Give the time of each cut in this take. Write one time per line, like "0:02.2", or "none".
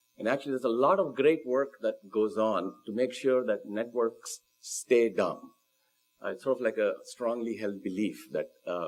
none